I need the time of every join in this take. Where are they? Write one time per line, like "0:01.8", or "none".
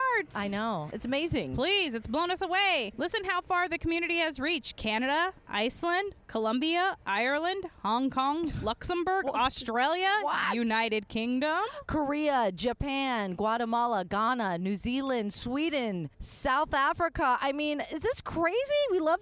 0:00.9